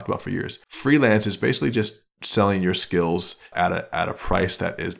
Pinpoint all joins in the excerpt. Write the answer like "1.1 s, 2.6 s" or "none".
3.5 s